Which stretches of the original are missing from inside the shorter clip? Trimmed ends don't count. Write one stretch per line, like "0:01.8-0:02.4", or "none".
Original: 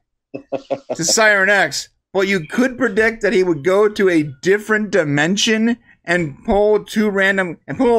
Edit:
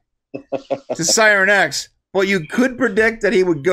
none